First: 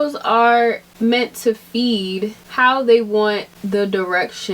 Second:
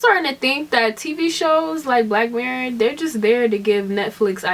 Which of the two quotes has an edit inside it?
first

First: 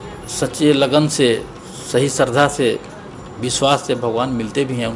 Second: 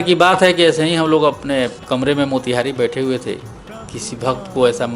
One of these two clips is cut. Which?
second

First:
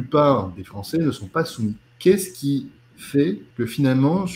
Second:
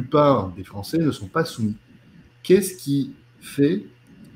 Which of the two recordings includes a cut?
first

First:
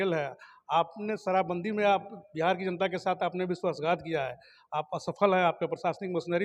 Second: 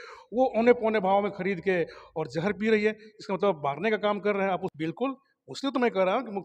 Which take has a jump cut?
second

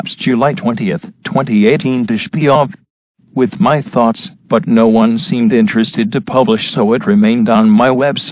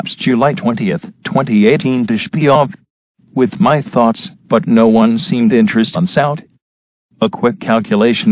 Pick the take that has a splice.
first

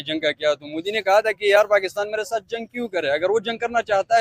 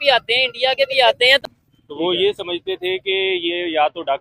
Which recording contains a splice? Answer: second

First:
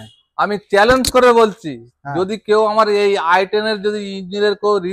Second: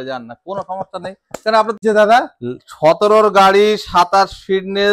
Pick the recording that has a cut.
second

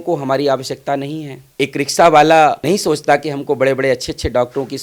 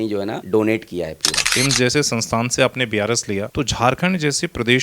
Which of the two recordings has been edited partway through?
second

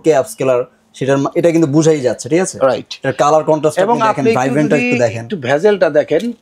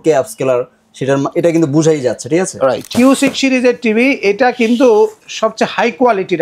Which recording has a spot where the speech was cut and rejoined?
second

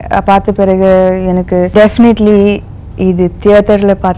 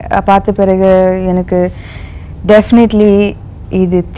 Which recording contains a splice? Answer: first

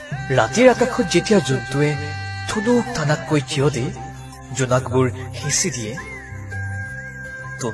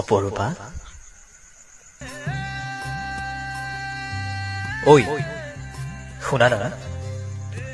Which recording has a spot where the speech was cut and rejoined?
second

